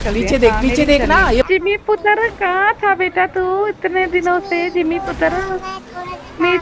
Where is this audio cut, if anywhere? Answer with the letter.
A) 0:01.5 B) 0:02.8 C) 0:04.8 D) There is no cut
A